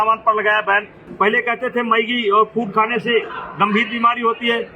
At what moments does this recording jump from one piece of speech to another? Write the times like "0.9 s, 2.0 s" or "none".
1.0 s